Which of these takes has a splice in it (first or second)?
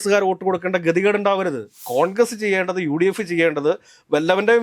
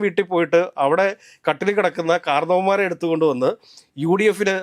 first